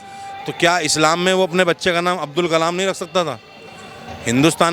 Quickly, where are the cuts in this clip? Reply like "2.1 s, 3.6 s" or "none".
none

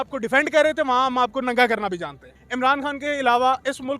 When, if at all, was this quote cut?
2.3 s

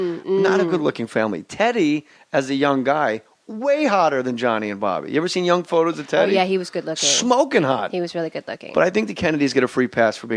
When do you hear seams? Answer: 7.5 s

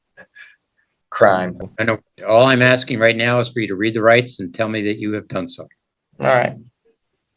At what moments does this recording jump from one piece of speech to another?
none

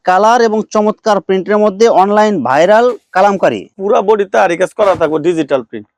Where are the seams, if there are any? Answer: 3.7 s

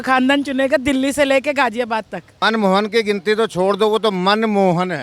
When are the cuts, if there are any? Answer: 2.2 s

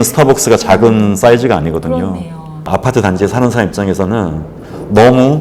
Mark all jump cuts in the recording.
2.7 s

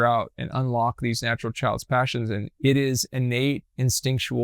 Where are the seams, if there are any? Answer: 2.5 s

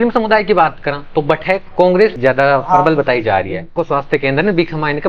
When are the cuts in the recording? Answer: 3.8 s

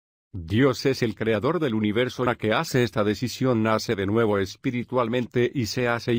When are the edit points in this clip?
none

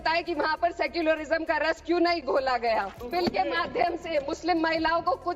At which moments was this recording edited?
3.0 s

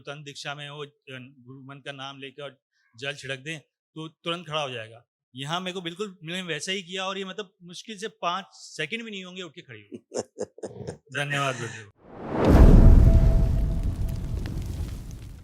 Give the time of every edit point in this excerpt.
11.8 s

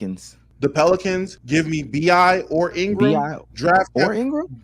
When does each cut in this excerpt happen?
1.3 s, 2.7 s

